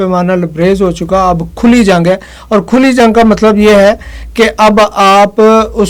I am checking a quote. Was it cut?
no; 0 cuts

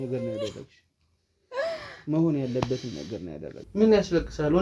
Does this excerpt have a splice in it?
yes; 1 cut; at 3.5 s

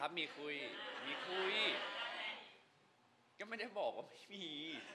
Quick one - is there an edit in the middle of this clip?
no; 0 cuts

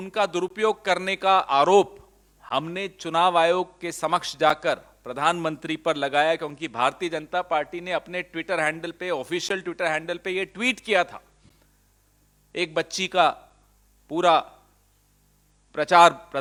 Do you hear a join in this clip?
no; 0 cuts

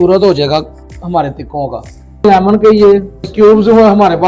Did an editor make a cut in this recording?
yes; 2 cuts; at 2.2 s, 3.3 s

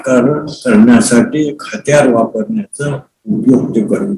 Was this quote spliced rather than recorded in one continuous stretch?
no; 0 cuts

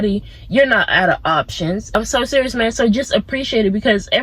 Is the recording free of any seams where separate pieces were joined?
no; 1 cut; at 2.0 s

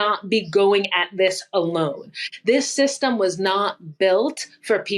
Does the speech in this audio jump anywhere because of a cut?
no; 0 cuts

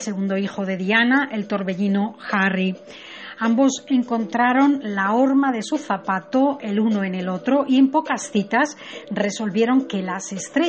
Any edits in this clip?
yes; 1 cut; at 3.7 s

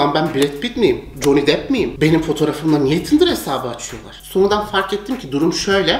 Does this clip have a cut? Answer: no; 0 cuts

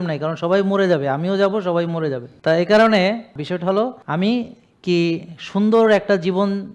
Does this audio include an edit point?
yes; 2 cuts; at 2.3 s, 3.8 s

